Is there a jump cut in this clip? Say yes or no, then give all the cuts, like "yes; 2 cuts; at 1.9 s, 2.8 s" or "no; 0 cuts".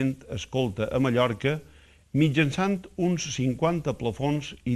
no; 0 cuts